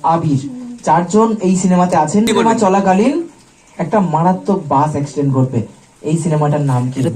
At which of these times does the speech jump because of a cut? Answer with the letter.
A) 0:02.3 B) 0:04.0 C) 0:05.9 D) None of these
A